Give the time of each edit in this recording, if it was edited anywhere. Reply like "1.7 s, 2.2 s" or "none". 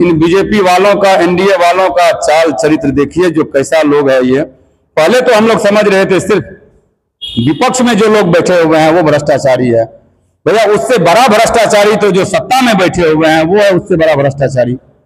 none